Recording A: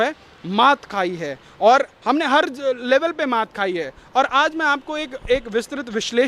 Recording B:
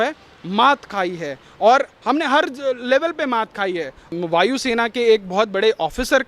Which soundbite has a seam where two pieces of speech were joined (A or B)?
B